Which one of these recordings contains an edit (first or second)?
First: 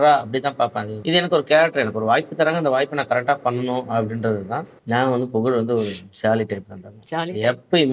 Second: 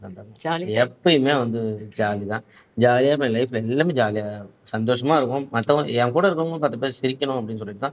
first